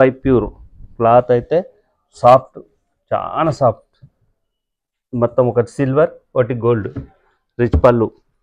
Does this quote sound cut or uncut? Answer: uncut